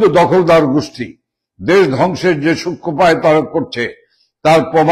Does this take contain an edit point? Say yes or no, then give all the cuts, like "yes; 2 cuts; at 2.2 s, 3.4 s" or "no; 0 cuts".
no; 0 cuts